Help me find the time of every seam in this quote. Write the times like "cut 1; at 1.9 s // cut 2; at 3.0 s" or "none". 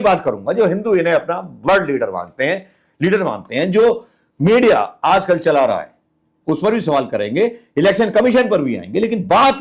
none